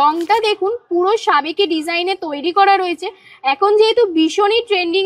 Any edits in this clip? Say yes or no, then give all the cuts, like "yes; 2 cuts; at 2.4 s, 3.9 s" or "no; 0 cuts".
no; 0 cuts